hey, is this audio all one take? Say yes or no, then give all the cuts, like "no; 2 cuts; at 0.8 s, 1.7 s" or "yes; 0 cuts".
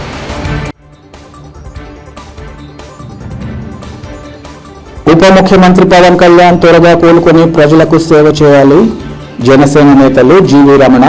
yes; 0 cuts